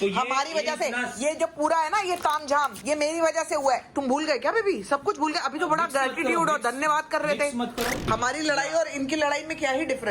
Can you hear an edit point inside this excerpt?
yes; 1 cut; at 8.1 s

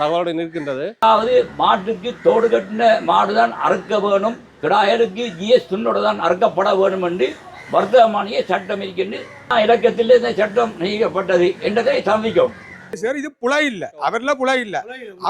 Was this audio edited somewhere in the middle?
yes; 4 cuts; at 1.0 s, 4.5 s, 9.5 s, 12.9 s

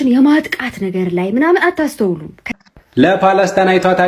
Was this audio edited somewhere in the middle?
yes; 1 cut; at 2.3 s

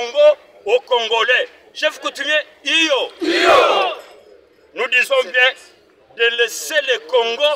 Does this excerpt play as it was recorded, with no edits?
yes; 0 cuts

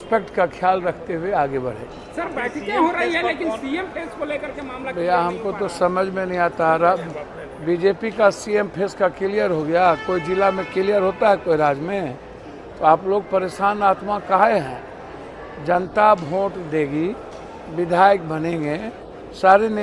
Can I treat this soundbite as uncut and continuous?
yes; 0 cuts

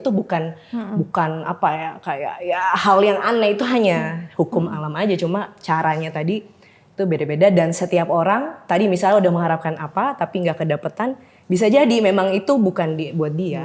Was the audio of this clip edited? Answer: no; 0 cuts

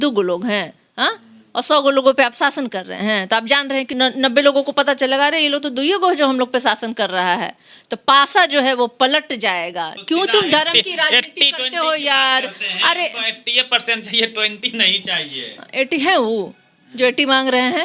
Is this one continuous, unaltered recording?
no; 2 cuts; at 3.9 s, 9.9 s

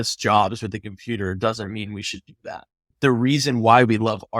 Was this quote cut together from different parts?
yes; 1 cut; at 2.9 s

